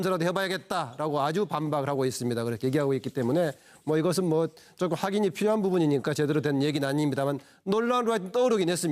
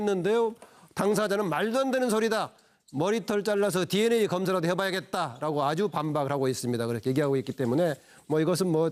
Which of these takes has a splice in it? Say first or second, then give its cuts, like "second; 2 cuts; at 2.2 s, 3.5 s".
first; 1 cut; at 6.5 s